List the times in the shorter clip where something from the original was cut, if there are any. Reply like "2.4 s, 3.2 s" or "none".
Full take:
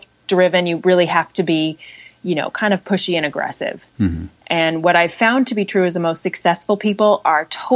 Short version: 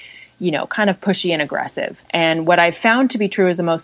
2.0 s